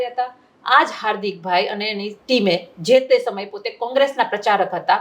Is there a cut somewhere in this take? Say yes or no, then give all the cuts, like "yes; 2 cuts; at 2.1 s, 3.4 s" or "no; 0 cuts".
no; 0 cuts